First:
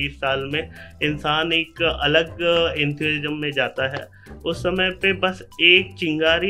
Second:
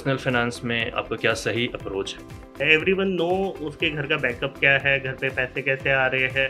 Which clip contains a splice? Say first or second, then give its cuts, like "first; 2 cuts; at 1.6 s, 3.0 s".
second; 2 cuts; at 1.2 s, 2.6 s